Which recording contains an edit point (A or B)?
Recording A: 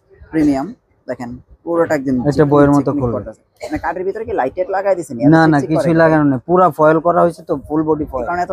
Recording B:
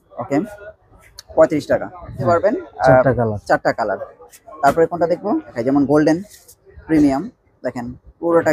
B